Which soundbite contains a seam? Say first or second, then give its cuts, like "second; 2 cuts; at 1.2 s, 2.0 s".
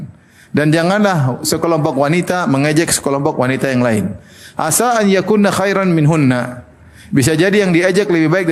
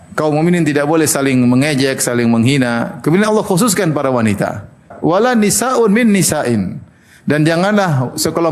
second; 1 cut; at 4.9 s